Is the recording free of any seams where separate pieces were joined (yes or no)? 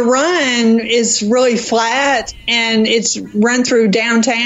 yes